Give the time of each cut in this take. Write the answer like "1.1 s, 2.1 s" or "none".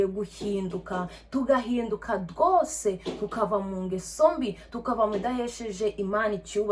none